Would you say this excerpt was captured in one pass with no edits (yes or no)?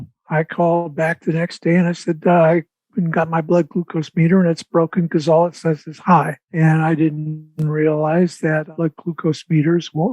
no